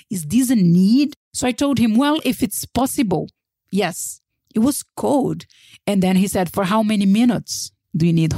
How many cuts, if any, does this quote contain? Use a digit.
1